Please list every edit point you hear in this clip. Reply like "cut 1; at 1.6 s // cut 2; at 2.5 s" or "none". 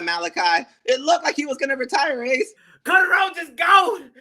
cut 1; at 2.6 s